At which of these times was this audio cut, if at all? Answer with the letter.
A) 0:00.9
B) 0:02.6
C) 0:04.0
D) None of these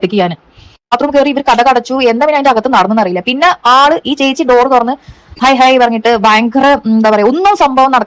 A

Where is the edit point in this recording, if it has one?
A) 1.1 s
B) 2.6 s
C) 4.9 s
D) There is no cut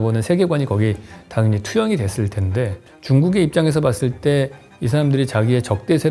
D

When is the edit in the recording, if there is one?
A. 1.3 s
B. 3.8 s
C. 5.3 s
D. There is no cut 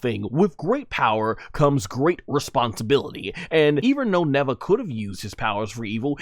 B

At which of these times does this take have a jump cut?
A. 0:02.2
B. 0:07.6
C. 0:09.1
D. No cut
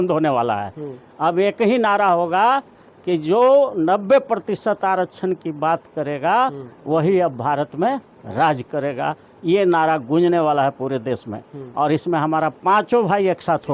D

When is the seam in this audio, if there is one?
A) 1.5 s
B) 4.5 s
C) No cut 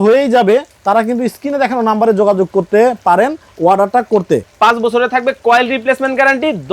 B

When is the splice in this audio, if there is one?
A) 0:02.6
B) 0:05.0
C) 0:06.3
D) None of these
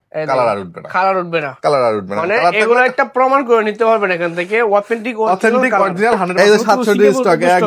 C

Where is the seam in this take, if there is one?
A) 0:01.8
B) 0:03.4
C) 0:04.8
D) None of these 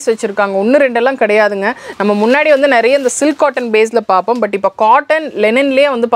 D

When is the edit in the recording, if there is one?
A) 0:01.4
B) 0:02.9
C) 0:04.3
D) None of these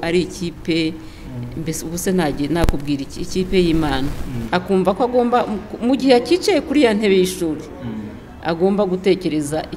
C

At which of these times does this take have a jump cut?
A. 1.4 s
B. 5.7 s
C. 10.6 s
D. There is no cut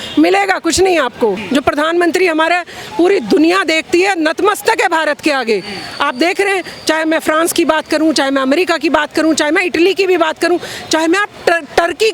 A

